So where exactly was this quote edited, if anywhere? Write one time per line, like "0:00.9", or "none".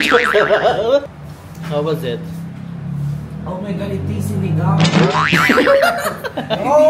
0:01.0

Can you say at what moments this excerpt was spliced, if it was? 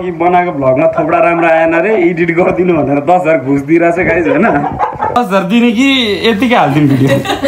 0:05.1

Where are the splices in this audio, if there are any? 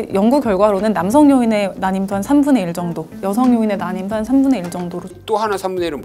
0:05.1

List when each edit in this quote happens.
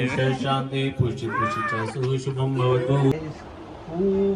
0:03.1

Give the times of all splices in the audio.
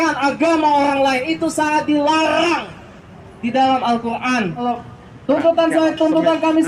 0:04.6

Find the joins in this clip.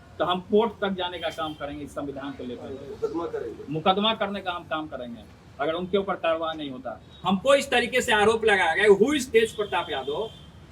0:07.2

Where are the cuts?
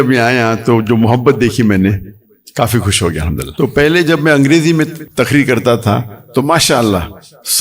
0:03.5
0:05.0

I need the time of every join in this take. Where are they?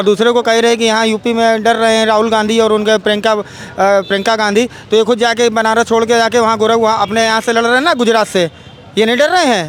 none

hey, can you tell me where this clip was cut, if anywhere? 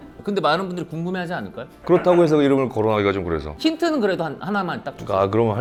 none

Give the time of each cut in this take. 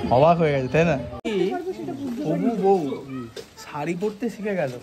0:01.2

